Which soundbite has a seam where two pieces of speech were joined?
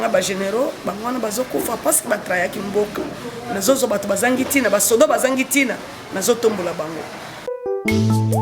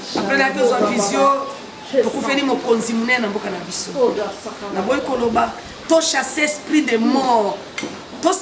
first; 1 cut; at 7.5 s

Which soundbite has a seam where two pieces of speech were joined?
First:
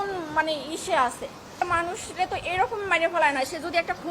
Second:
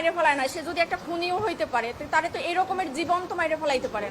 first; 1 cut; at 1.5 s

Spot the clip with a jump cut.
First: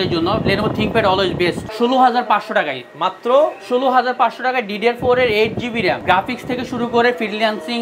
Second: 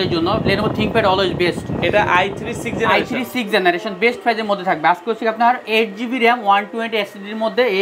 first; 2 cuts; at 1.6 s, 6.0 s

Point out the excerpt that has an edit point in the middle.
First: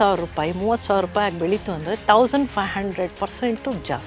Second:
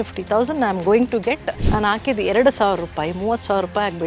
second; 1 cut; at 1.6 s

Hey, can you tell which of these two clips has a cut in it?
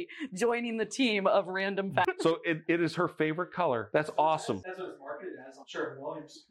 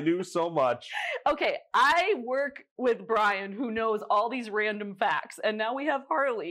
first; 3 cuts; at 2.0 s, 3.8 s, 4.6 s

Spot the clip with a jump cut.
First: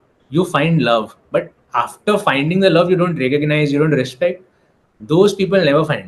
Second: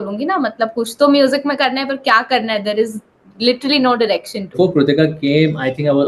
second; 1 cut; at 4.5 s

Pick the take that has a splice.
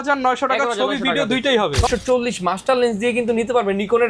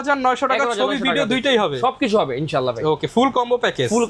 first; 1 cut; at 1.9 s

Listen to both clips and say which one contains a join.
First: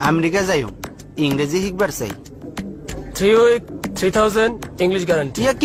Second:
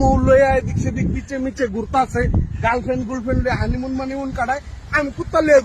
second; 1 cut; at 4.7 s

